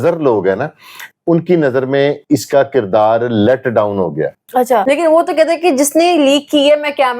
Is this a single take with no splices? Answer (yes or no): no